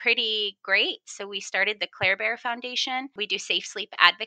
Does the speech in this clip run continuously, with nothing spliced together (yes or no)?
no